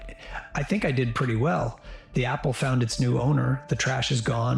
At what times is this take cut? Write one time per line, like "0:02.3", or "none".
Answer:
0:01.2